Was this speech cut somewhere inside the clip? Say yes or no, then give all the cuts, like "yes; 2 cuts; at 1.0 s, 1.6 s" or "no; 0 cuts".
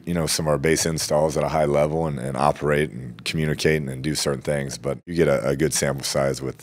yes; 1 cut; at 5.1 s